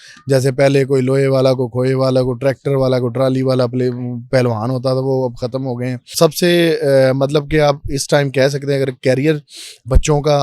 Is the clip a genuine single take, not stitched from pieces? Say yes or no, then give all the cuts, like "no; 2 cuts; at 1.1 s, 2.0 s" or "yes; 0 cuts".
no; 1 cut; at 6.1 s